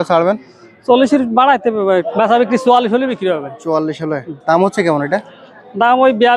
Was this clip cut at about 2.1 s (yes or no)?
yes